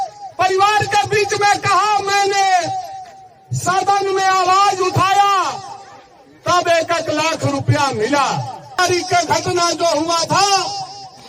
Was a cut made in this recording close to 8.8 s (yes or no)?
yes